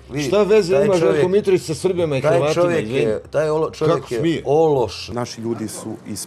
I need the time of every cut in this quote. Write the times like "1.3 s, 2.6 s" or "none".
5.0 s